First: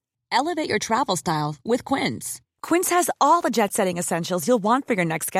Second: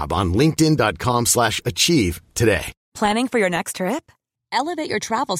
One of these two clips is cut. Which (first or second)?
second